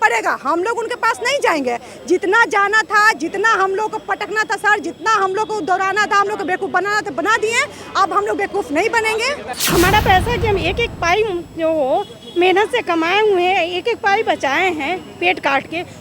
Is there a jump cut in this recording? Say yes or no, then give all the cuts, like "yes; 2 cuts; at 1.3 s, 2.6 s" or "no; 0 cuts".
yes; 1 cut; at 9.6 s